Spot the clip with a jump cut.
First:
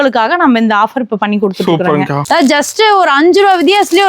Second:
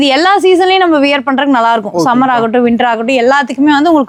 first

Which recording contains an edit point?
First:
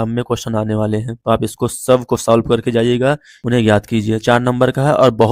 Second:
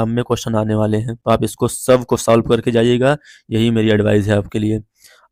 first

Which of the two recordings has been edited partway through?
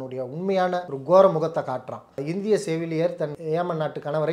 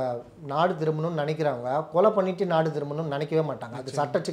first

